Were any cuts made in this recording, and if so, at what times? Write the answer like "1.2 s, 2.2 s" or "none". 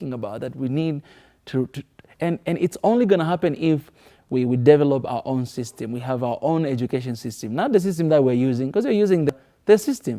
9.3 s